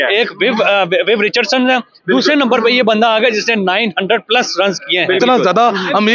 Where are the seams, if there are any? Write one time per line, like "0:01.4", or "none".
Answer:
0:05.2